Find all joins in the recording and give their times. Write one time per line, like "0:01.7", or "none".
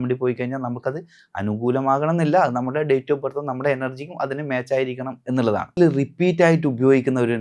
0:05.8